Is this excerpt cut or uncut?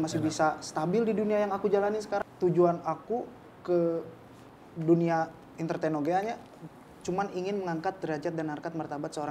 cut